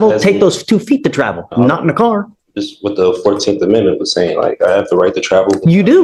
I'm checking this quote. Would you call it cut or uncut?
uncut